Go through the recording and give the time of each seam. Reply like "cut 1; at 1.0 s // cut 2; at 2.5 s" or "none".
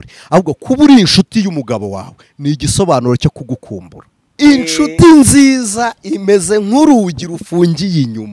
cut 1; at 4.3 s

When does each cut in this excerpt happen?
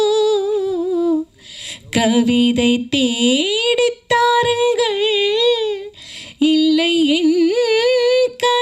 none

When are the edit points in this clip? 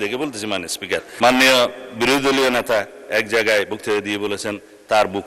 cut 1; at 1.1 s

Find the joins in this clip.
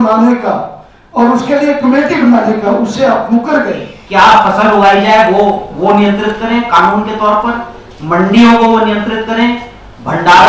cut 1; at 4.0 s

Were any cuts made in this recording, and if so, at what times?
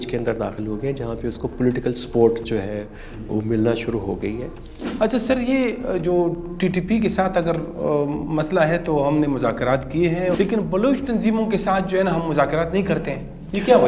cut 1; at 4.8 s // cut 2; at 10.3 s

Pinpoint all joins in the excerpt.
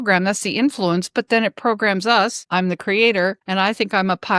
cut 1; at 2.4 s // cut 2; at 3.4 s

